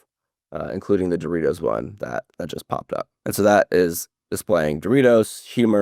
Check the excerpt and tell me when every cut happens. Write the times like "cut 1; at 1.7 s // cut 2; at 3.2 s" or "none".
cut 1; at 3.1 s